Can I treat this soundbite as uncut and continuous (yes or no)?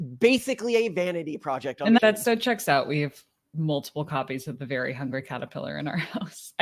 yes